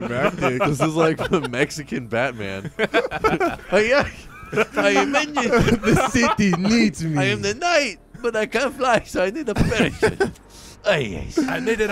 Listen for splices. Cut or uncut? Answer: uncut